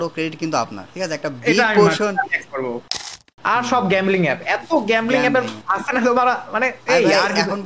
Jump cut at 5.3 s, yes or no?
no